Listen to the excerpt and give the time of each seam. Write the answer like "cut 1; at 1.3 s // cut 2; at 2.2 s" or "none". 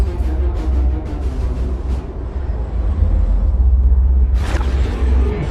cut 1; at 3.2 s